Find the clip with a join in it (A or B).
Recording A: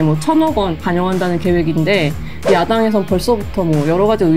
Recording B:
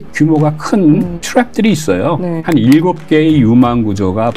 B